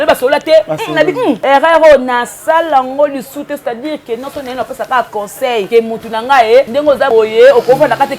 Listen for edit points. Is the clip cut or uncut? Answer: cut